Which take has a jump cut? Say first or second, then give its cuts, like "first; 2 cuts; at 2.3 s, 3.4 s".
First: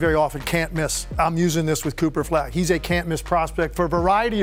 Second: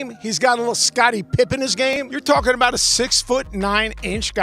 second; 1 cut; at 2.1 s